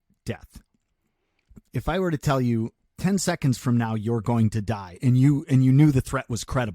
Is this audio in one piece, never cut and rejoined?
no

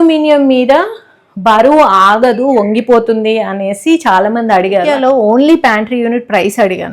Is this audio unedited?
no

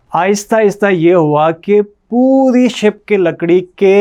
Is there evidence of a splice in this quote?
no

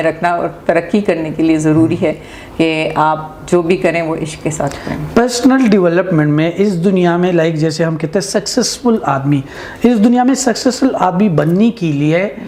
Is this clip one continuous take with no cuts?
yes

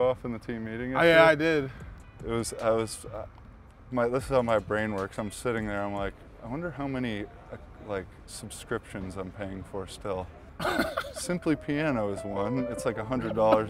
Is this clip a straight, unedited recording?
yes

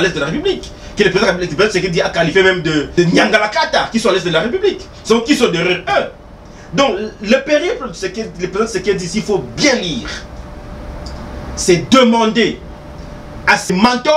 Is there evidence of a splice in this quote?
no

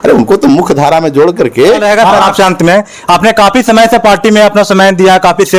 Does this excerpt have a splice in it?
yes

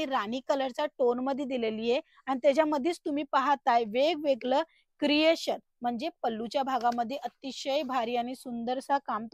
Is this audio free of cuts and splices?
yes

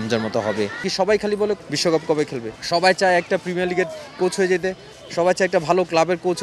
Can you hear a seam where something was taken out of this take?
yes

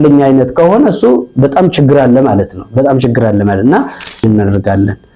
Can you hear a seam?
yes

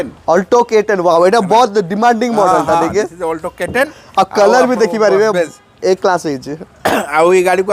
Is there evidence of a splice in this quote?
no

